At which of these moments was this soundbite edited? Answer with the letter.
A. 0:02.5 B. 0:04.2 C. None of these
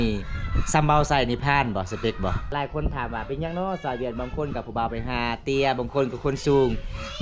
A